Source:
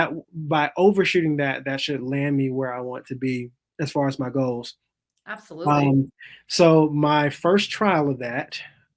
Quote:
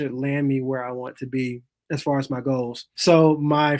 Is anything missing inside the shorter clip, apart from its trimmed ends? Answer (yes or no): yes